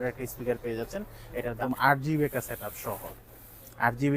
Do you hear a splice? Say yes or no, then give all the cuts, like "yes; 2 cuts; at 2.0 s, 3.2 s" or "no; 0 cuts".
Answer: yes; 1 cut; at 1.6 s